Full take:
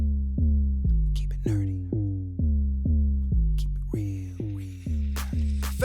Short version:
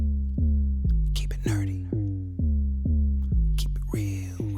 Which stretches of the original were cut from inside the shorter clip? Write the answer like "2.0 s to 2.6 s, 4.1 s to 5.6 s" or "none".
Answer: none